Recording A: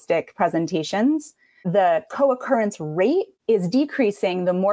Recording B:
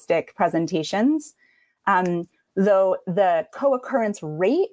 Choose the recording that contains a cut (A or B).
A